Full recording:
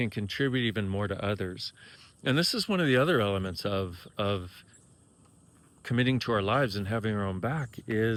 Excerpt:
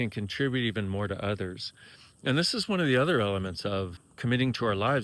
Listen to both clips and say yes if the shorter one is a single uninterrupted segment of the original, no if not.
no